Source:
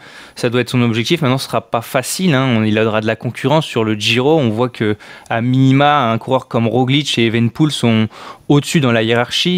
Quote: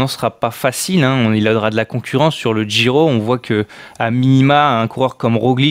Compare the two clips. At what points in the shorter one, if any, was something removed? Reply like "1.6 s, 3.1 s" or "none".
none